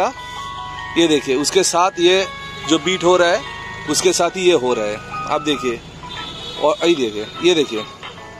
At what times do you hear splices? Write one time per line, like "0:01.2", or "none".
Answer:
none